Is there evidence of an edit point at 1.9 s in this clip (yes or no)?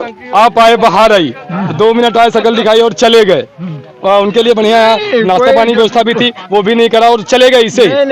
no